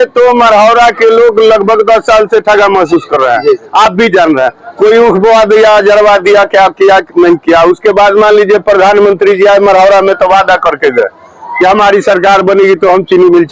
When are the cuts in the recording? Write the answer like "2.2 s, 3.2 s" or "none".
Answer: none